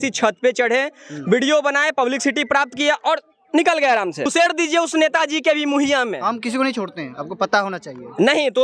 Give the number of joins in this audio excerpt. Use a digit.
1